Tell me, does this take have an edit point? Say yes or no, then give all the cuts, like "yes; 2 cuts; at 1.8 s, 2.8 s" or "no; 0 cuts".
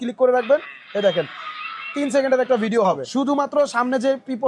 yes; 1 cut; at 3.0 s